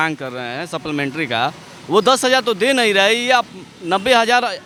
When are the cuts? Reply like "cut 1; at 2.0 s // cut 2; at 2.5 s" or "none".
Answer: none